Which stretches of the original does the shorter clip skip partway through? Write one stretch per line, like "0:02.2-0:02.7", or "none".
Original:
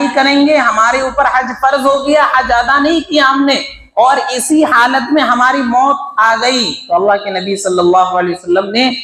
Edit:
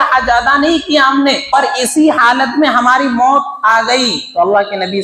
0:03.8-0:04.1